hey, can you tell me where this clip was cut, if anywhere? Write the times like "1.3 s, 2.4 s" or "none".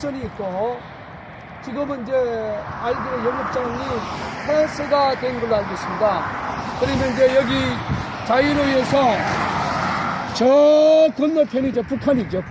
11.2 s